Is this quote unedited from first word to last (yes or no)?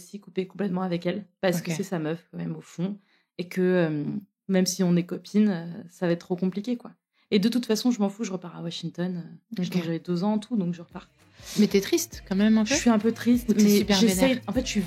yes